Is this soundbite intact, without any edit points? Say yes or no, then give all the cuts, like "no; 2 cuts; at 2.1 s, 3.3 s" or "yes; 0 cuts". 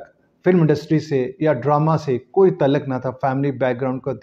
yes; 0 cuts